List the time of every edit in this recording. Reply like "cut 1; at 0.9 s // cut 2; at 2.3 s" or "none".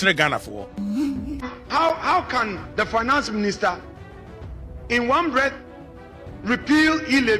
cut 1; at 1.6 s